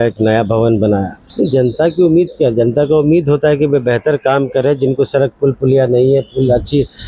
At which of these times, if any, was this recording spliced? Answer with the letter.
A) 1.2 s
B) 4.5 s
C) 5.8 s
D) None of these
A